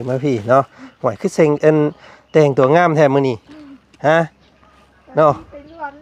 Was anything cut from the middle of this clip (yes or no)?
no